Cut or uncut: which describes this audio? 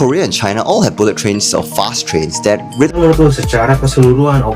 cut